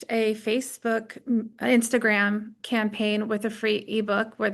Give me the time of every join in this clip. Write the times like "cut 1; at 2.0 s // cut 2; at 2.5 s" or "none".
cut 1; at 2.6 s

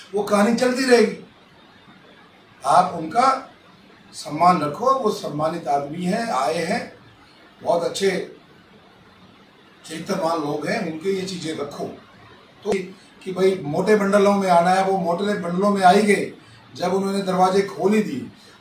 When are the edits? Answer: cut 1; at 12.7 s

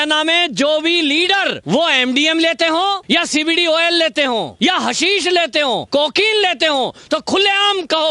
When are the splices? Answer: cut 1; at 1.6 s // cut 2; at 3.0 s // cut 3; at 4.5 s // cut 4; at 5.8 s

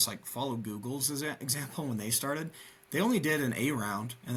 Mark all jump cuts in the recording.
none

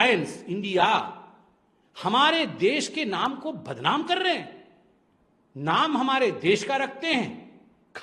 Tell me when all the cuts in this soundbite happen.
none

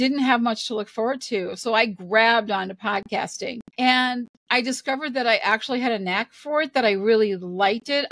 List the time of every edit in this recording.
cut 1; at 3.7 s

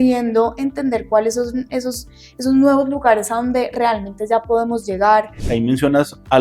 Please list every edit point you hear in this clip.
cut 1; at 5.4 s

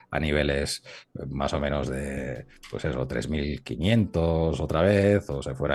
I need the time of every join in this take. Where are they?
none

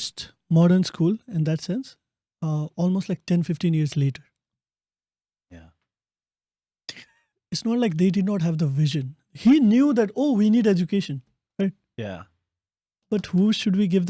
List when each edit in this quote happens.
cut 1; at 7.2 s

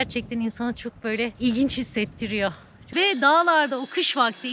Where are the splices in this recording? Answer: cut 1; at 2.7 s

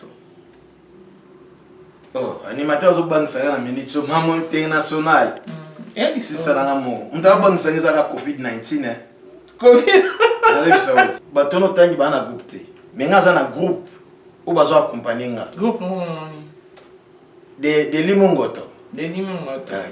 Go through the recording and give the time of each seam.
cut 1; at 11.1 s

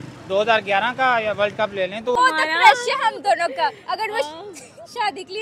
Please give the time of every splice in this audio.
cut 1; at 2.2 s

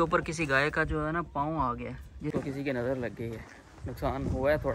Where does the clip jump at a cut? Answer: cut 1; at 2.3 s

